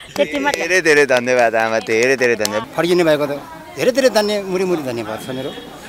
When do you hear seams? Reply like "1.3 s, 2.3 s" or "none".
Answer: 2.6 s